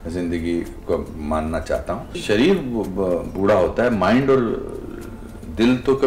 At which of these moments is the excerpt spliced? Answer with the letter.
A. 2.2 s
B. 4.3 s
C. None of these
A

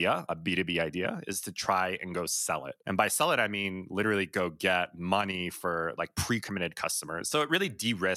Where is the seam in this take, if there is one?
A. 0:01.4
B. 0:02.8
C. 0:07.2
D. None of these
C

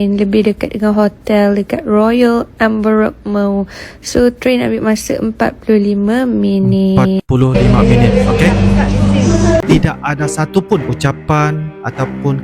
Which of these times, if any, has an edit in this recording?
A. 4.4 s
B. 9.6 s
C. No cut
B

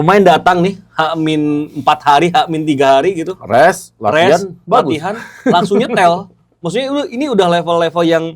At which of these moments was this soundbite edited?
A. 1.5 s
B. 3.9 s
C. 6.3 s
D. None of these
D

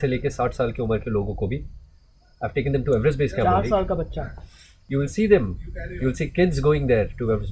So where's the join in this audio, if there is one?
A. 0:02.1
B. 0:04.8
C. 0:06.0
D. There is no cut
D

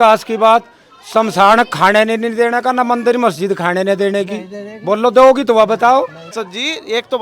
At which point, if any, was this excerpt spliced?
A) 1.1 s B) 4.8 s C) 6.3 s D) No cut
C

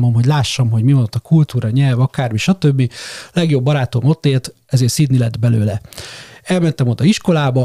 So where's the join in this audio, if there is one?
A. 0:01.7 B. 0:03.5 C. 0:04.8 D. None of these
D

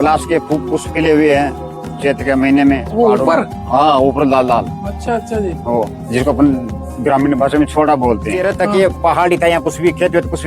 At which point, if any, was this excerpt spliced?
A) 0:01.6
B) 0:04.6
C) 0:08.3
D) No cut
C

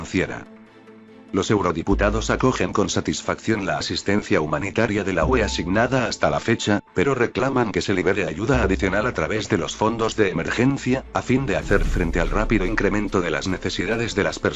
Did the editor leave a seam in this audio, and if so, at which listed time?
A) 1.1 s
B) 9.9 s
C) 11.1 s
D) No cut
A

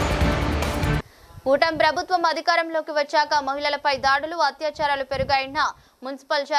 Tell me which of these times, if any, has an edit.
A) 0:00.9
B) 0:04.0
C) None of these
A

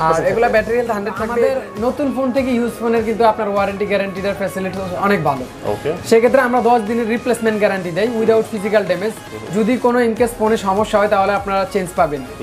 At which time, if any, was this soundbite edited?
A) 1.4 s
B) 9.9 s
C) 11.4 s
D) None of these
A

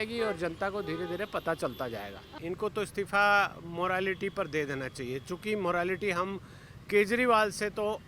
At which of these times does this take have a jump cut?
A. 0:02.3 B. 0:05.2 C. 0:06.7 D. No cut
A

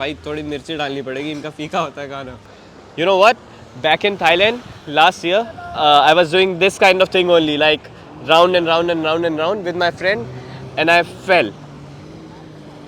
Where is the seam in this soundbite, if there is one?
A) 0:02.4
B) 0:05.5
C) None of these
A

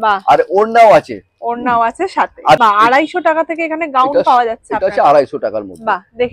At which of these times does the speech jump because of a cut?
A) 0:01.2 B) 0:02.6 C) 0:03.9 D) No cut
B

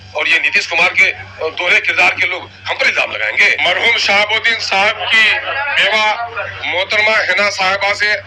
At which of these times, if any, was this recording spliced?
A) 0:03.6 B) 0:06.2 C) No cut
A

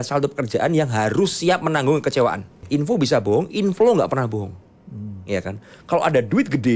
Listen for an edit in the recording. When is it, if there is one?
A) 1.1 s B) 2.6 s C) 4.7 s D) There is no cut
B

